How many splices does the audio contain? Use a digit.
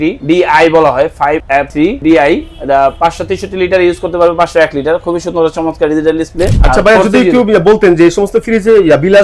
1